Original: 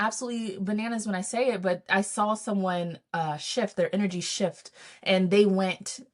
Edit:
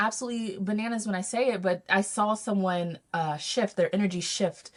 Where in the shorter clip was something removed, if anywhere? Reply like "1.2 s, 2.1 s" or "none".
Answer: none

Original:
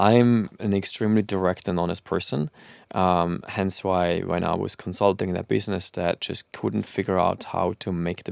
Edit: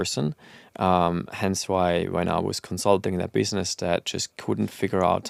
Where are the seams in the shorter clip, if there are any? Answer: none

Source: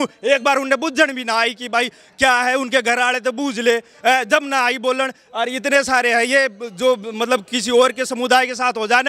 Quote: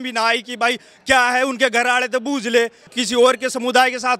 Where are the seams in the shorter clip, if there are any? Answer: 2.9 s

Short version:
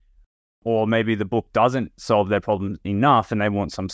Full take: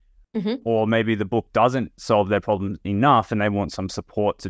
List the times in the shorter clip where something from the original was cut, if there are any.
none

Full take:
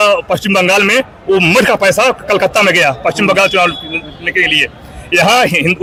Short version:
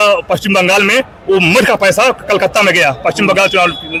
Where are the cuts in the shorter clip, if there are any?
none

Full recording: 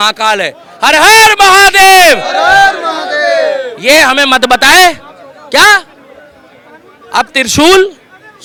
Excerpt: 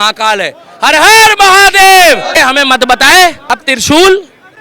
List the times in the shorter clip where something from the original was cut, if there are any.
2.4 s, 3.7 s

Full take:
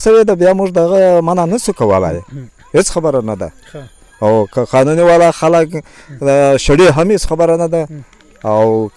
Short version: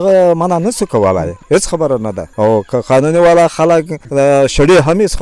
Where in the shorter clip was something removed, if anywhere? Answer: 1.4 s, 2.2 s, 4.0 s

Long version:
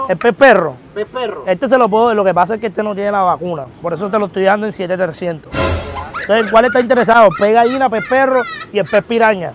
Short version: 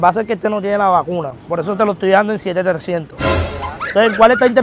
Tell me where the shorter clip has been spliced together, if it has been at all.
none

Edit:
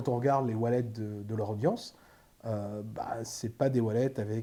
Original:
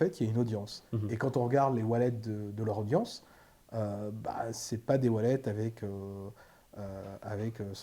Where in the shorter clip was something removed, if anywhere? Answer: none

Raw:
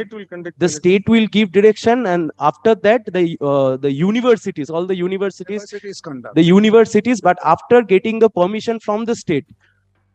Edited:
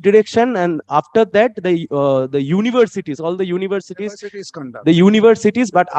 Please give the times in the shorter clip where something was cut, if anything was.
none

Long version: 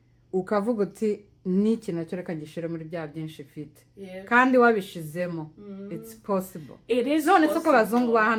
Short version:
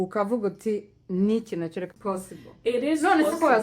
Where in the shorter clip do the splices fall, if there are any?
1.9 s

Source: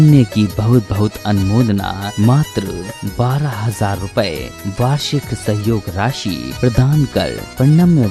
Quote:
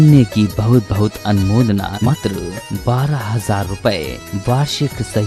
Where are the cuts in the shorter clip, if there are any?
2.1 s

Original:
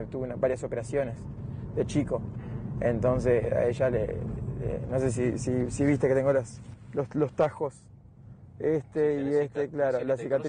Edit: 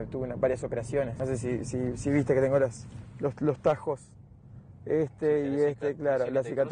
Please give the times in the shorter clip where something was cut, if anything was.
1.2 s

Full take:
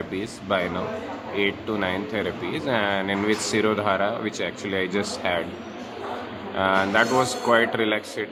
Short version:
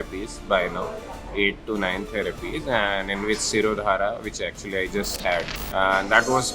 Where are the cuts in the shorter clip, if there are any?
5.6 s

